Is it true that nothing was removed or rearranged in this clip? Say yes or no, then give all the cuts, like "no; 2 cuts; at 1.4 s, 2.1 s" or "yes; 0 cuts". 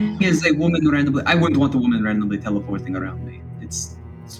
yes; 0 cuts